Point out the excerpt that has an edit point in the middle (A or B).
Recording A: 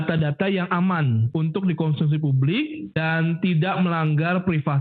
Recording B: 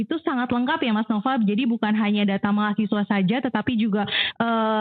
A